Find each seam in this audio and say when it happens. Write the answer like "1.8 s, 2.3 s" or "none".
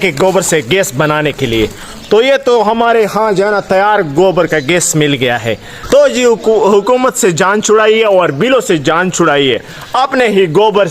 5.7 s